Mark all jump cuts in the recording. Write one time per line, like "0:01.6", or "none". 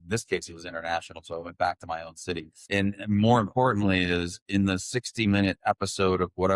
0:02.5